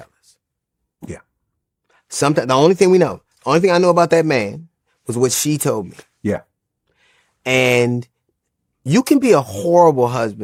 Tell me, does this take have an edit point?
no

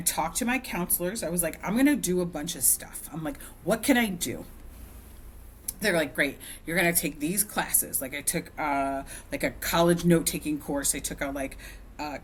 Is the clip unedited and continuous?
yes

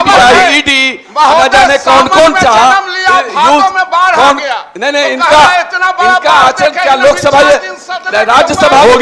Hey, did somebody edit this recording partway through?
no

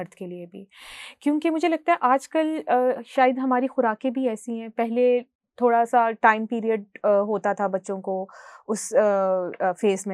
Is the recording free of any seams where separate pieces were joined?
yes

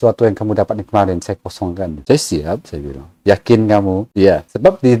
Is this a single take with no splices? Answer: yes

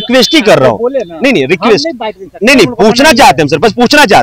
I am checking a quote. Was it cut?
no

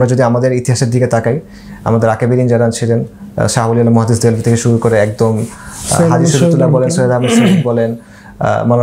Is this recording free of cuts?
yes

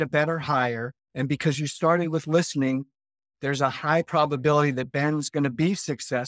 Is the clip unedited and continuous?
yes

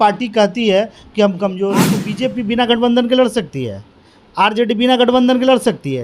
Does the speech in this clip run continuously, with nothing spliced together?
no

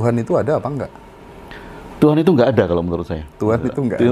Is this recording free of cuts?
yes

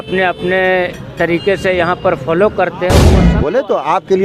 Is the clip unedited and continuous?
no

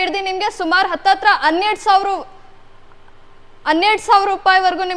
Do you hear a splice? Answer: no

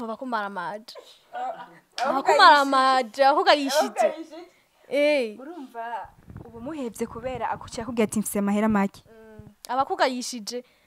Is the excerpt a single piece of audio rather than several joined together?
yes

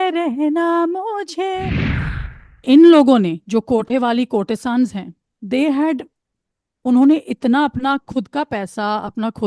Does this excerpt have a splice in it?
yes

